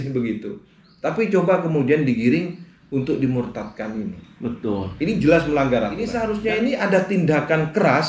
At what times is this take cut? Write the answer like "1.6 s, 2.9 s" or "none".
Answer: 6.2 s